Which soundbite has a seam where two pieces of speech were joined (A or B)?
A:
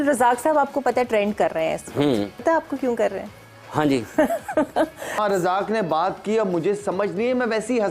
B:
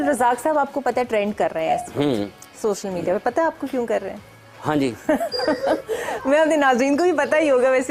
A